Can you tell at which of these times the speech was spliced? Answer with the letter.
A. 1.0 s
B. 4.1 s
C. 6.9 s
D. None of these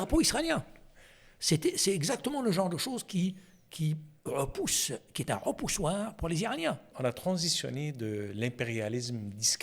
C